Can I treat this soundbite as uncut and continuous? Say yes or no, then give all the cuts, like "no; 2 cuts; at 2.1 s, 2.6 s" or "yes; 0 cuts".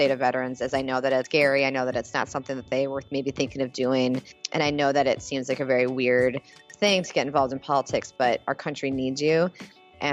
no; 2 cuts; at 1.3 s, 4.4 s